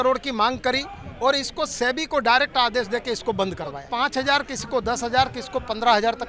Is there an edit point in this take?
yes; 1 cut; at 3.8 s

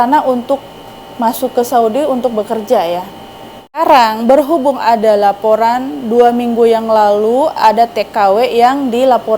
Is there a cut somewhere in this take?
yes; 1 cut; at 3.8 s

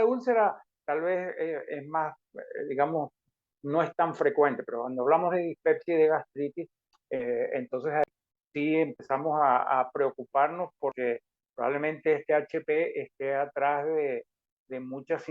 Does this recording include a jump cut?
yes; 1 cut; at 8.0 s

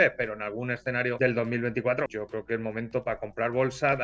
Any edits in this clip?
yes; 2 cuts; at 1.2 s, 2.1 s

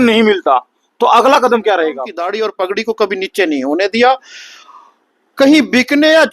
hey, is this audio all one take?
no; 1 cut; at 2.1 s

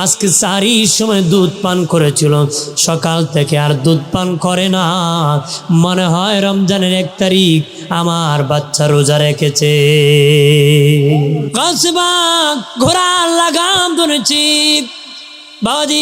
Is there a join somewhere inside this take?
yes; 2 cuts; at 11.5 s, 12.7 s

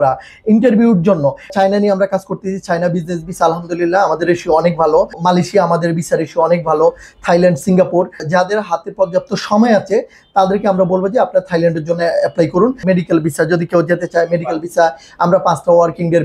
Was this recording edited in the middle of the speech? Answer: yes; 4 cuts; at 1.5 s, 5.2 s, 8.2 s, 12.8 s

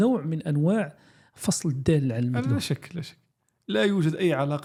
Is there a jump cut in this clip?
no; 0 cuts

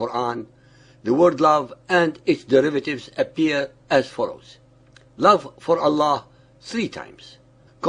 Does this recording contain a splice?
yes; 1 cut; at 6.3 s

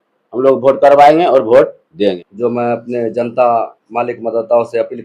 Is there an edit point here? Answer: yes; 1 cut; at 2.3 s

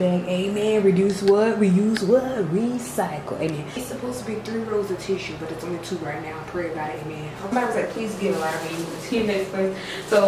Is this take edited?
yes; 2 cuts; at 3.8 s, 7.5 s

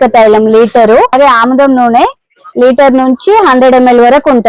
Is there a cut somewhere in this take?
yes; 1 cut; at 1.1 s

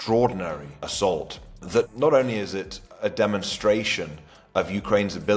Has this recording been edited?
no; 0 cuts

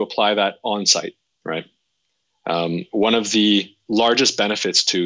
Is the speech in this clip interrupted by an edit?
yes; 2 cuts; at 1.3 s, 3.8 s

